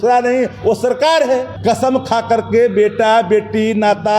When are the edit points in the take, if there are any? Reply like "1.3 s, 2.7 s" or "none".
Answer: 1.5 s